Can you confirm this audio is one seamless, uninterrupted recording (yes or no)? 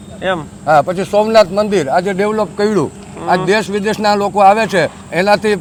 yes